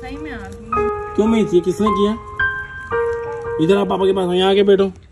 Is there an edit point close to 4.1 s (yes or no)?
no